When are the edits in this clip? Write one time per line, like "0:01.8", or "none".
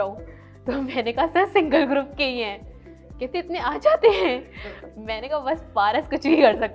none